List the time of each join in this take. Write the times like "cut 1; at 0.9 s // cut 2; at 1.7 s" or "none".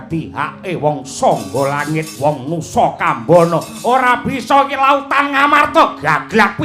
cut 1; at 2.1 s